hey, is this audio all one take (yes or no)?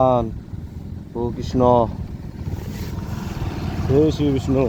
yes